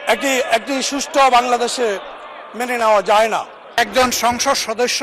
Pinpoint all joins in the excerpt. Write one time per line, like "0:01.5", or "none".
0:03.8